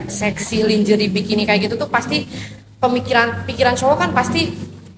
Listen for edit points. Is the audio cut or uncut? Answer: uncut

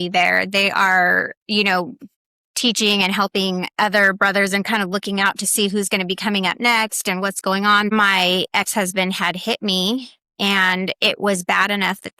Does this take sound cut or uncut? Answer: cut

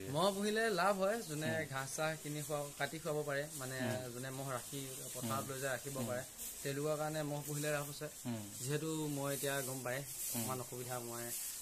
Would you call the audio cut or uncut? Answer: uncut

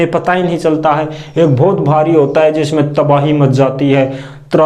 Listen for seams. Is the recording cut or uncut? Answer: uncut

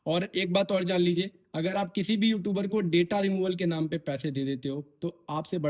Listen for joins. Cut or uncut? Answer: uncut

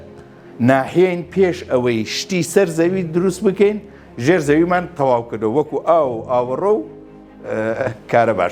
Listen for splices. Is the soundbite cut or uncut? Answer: uncut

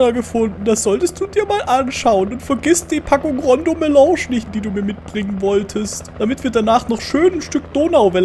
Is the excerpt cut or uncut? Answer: cut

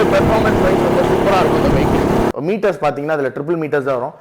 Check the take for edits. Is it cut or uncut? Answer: cut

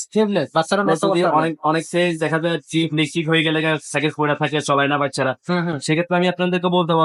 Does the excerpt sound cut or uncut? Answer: uncut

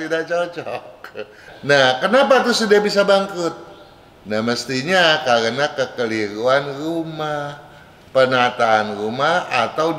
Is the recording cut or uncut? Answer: cut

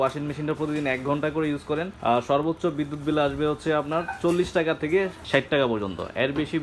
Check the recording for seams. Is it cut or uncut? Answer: cut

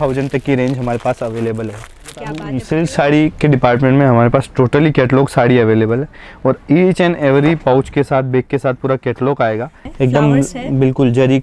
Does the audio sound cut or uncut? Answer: cut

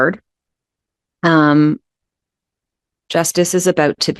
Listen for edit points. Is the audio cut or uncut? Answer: uncut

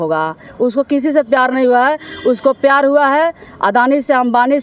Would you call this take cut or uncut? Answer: uncut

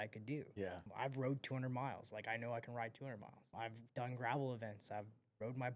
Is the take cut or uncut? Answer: cut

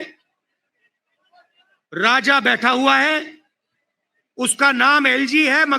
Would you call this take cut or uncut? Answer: uncut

